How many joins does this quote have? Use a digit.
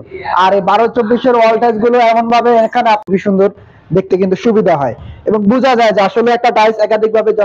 1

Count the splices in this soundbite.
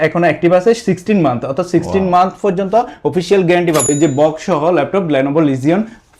1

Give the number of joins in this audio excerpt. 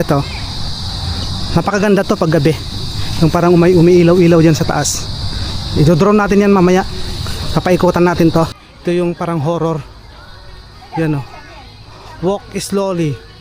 1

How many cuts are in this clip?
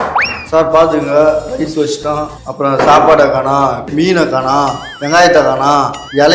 2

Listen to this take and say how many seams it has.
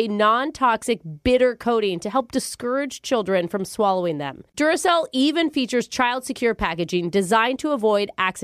0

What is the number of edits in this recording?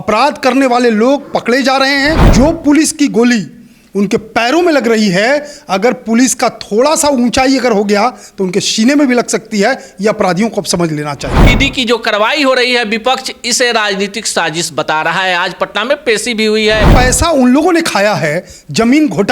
3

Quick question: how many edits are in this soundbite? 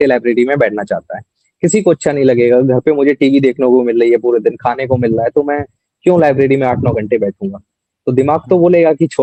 0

